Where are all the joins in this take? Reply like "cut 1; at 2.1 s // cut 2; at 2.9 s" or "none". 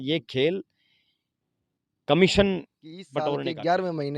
cut 1; at 3.1 s